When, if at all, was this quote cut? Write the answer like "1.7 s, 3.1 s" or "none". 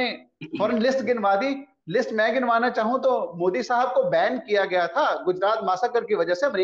none